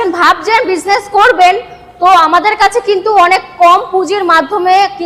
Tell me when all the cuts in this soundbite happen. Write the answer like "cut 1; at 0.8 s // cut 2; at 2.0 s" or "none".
none